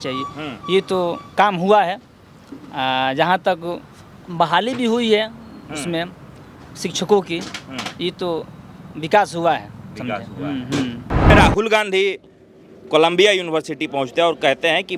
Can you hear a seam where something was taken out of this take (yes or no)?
yes